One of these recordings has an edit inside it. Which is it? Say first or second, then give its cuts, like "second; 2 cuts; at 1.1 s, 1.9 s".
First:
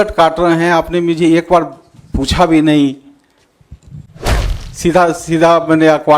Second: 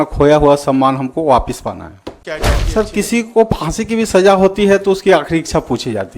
second; 1 cut; at 2.2 s